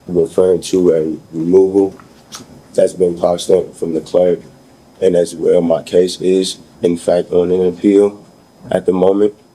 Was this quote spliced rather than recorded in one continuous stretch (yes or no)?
no